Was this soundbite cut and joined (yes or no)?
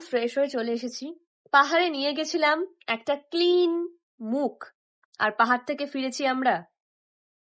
no